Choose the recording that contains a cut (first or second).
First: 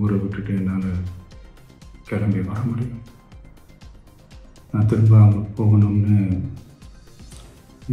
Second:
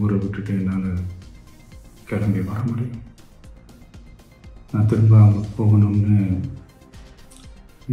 first